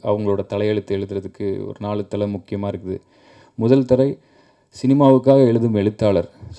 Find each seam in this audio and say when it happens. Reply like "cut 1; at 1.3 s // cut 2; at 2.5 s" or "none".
none